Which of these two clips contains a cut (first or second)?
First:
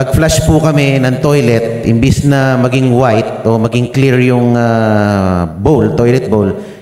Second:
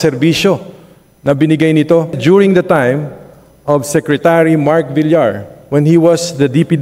second